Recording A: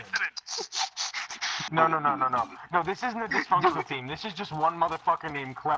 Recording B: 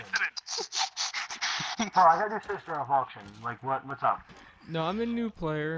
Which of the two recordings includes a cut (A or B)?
A